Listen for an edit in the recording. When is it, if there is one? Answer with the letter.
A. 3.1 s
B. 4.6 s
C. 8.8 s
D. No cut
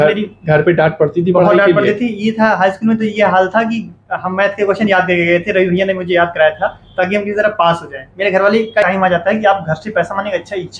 C